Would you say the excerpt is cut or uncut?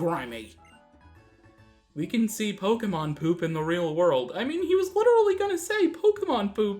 cut